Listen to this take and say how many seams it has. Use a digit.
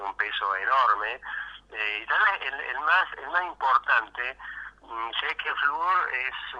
1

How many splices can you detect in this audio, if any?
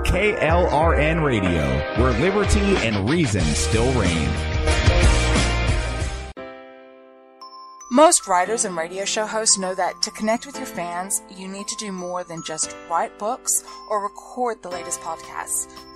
1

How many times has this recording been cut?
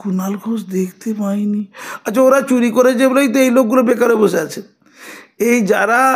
0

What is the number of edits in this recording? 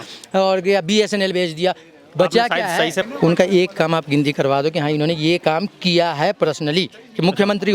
1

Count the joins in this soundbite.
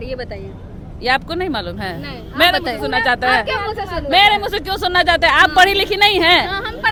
0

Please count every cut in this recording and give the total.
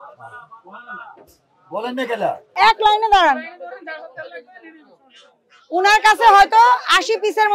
1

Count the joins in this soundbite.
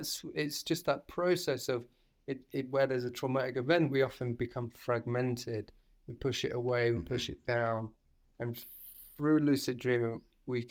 0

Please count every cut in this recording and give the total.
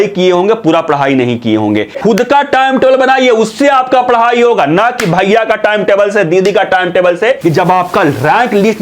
2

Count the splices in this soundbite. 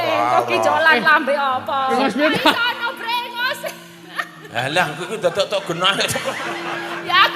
1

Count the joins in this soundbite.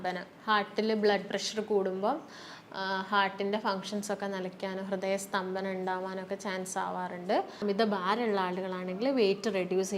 1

